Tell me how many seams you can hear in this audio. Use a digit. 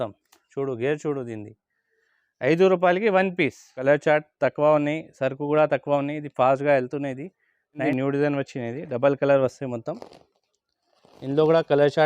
2